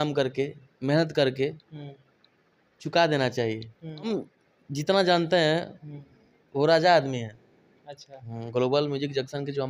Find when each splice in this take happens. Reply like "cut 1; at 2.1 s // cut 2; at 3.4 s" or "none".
cut 1; at 4.1 s

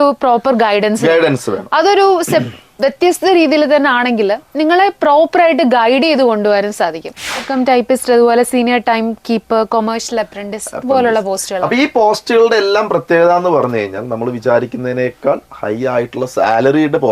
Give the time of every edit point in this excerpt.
cut 1; at 7.5 s

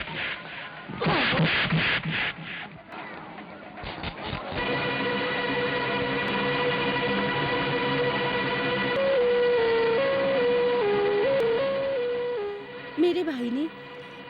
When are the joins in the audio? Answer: none

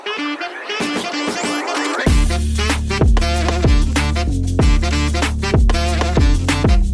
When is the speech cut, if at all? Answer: none

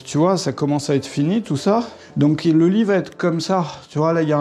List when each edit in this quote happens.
cut 1; at 2.0 s

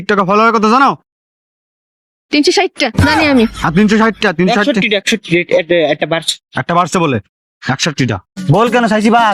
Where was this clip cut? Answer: cut 1; at 8.3 s

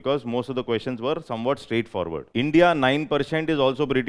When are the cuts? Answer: cut 1; at 2.3 s

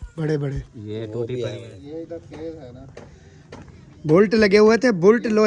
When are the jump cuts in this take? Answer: cut 1; at 1.7 s

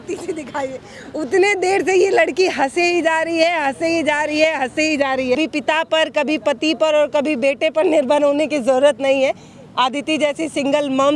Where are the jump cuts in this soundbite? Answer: cut 1; at 5.3 s

